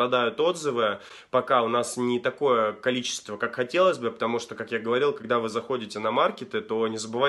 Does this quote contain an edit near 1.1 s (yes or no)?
no